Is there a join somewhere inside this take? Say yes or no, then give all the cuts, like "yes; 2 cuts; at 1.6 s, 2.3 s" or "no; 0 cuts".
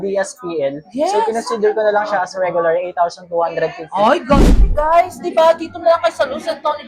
yes; 1 cut; at 4.4 s